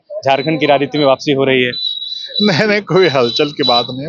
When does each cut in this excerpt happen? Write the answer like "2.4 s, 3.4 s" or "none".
none